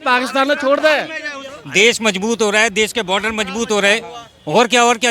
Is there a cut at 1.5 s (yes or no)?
yes